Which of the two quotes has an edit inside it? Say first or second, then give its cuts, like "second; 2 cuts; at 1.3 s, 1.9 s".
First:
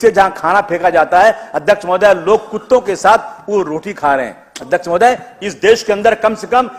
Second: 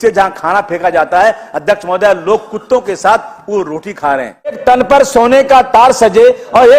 second; 1 cut; at 4.6 s